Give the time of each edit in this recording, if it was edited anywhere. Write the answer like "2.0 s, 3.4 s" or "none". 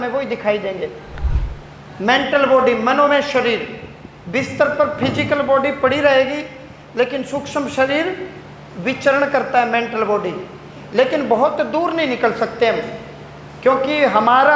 none